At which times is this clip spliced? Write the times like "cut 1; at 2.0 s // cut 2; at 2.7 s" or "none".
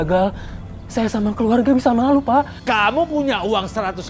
none